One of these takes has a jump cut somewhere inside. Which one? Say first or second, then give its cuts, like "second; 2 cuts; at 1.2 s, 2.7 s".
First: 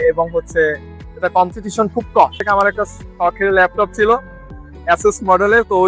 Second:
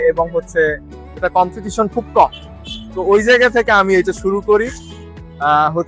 first; 1 cut; at 2.4 s